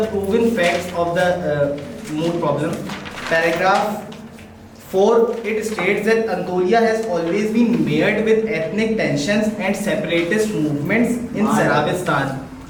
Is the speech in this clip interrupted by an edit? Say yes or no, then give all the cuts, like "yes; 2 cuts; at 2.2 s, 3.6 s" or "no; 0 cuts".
no; 0 cuts